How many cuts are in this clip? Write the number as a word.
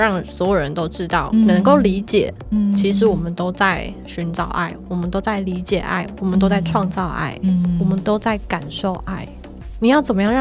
zero